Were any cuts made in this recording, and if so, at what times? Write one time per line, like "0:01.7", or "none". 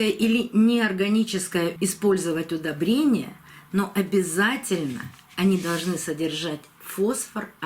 0:01.7